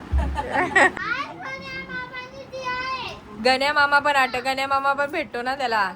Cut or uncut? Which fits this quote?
cut